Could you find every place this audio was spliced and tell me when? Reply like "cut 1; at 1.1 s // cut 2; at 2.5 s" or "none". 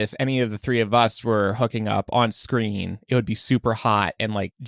none